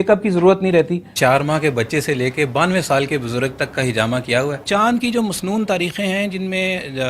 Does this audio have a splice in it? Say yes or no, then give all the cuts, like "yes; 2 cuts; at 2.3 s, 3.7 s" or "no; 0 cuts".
yes; 2 cuts; at 1.1 s, 4.6 s